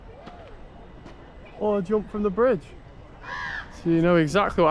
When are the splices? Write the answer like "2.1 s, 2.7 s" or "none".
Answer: none